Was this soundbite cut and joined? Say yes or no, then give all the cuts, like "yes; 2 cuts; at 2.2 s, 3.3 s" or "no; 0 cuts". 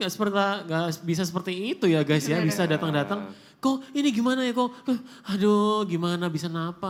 no; 0 cuts